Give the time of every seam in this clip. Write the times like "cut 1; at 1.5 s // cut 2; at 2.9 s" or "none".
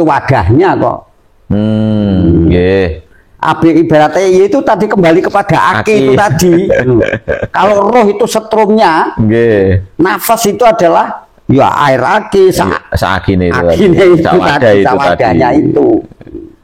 none